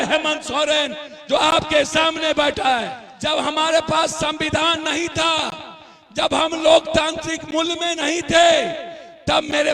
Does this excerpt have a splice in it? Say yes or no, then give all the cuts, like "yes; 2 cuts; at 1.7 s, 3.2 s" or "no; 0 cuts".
yes; 1 cut; at 3.0 s